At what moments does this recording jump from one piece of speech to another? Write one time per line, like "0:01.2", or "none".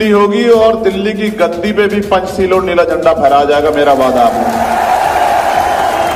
none